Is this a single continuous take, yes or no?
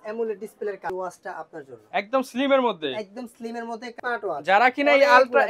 no